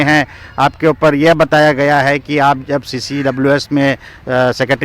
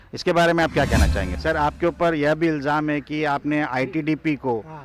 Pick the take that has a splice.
second; 1 cut; at 1.4 s

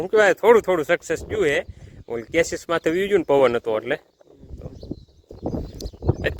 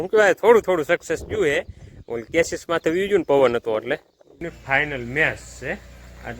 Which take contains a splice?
second; 1 cut; at 4.4 s

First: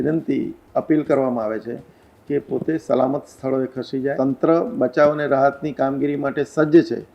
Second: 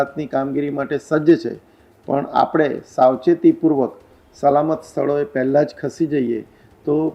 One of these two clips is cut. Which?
first; 1 cut; at 4.1 s

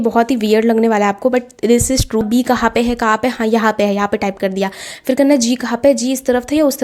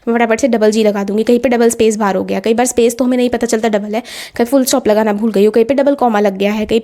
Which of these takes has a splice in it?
first; 1 cut; at 2.2 s

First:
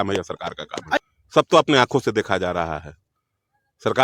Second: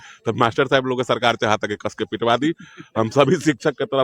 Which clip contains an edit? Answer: first; 1 cut; at 1.0 s

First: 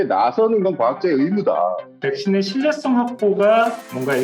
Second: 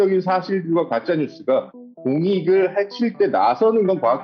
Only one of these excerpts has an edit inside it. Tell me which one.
first; 1 cut; at 1.9 s

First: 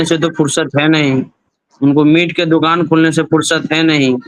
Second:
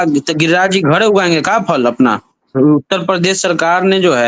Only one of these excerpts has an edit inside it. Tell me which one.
second; 1 cut; at 2.5 s

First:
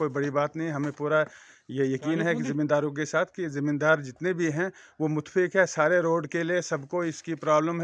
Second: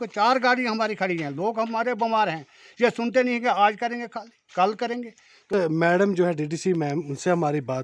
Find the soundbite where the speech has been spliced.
second; 1 cut; at 5.5 s

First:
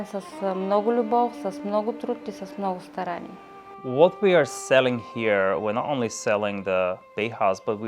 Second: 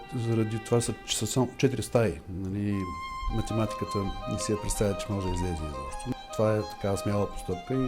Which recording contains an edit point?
first; 1 cut; at 3.7 s

